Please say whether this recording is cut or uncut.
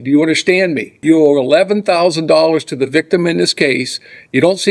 cut